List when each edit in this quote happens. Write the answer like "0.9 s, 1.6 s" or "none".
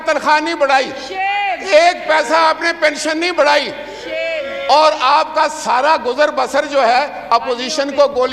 none